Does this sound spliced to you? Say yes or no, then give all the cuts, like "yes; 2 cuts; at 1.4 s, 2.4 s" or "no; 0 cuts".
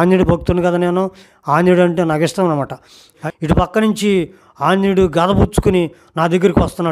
yes; 1 cut; at 3.2 s